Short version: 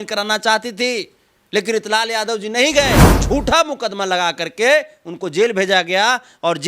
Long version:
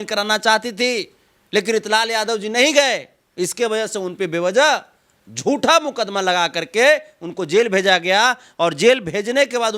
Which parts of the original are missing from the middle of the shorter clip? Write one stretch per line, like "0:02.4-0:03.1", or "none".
0:03.1-0:05.3